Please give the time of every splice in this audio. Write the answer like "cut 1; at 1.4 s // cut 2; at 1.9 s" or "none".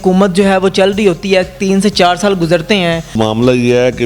cut 1; at 3.1 s